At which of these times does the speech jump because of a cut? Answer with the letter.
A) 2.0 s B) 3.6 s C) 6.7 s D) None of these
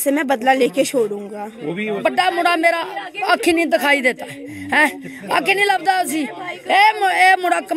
A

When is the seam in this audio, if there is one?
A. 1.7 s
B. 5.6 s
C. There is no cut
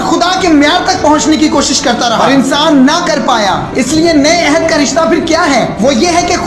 C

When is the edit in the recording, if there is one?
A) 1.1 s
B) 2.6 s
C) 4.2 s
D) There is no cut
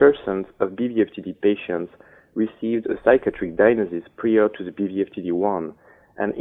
D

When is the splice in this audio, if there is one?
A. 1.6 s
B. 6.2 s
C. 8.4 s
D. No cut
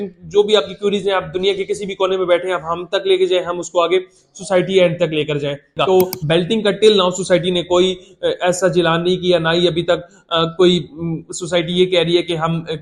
B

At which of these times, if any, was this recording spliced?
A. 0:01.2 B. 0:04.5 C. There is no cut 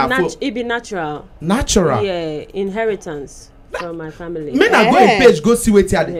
C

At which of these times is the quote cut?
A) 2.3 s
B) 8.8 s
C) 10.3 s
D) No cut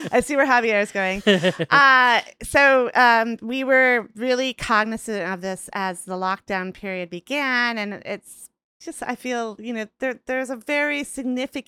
B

